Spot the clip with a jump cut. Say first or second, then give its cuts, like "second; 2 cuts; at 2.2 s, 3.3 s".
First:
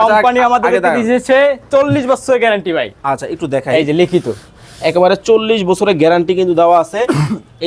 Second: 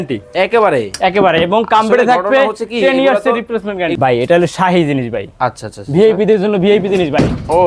second; 1 cut; at 3.9 s